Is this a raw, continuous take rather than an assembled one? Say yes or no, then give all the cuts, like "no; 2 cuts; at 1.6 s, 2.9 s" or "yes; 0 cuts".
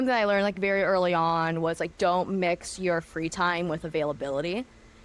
yes; 0 cuts